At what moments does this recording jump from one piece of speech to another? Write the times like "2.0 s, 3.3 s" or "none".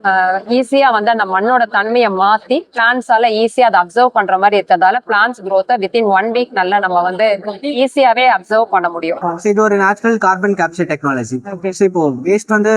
9.3 s